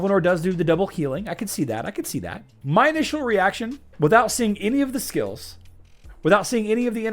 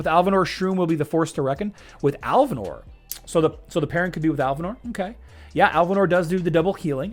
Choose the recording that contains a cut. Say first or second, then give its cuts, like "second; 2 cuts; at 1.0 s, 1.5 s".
first; 1 cut; at 2.5 s